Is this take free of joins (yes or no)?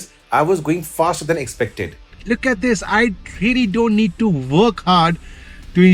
no